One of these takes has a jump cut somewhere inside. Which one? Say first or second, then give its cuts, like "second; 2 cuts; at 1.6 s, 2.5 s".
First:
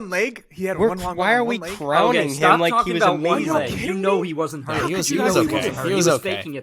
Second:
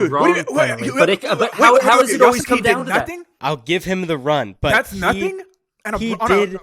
second; 1 cut; at 3.2 s